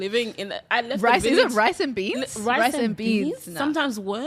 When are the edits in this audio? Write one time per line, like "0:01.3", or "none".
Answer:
none